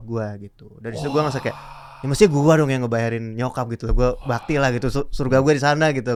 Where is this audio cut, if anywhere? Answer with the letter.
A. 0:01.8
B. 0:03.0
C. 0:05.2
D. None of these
D